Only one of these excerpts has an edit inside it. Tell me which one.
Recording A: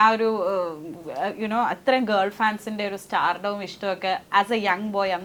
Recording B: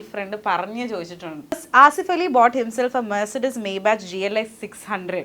B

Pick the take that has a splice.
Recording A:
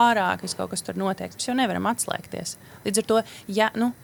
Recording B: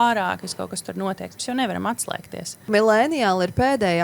B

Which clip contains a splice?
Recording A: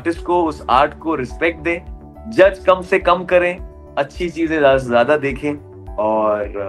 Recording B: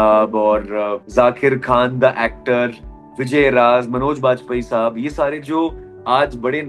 B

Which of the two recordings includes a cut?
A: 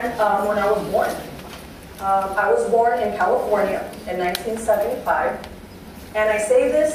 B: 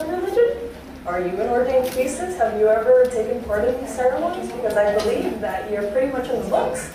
B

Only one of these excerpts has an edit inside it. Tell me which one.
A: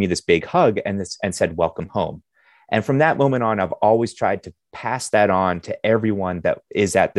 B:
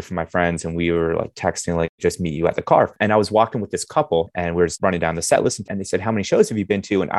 B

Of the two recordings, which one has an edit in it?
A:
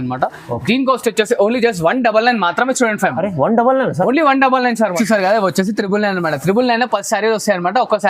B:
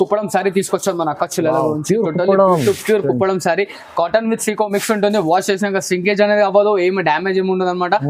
A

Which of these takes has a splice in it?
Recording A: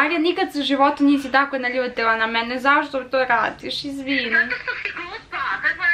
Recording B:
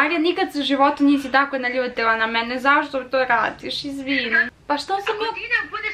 B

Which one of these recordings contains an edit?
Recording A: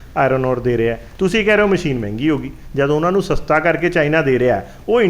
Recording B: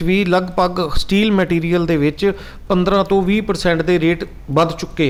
A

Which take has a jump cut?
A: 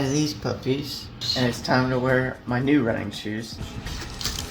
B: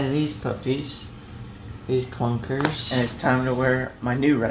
A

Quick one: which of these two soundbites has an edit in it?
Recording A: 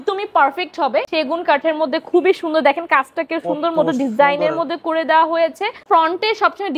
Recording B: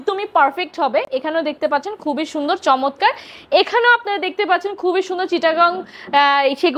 A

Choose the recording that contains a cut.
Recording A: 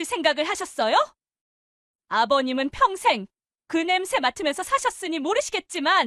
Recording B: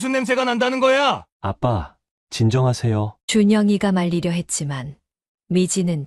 B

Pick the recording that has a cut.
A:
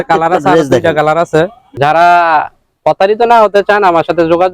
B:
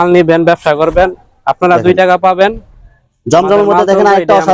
A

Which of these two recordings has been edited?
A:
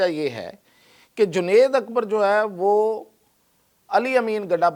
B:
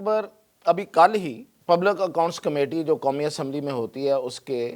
B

